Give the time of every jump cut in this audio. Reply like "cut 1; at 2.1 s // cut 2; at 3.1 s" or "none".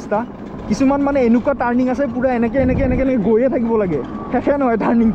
none